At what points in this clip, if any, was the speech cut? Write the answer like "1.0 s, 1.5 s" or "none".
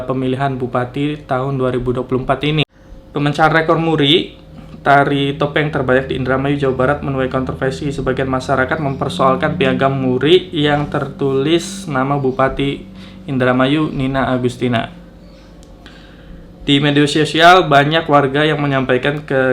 2.6 s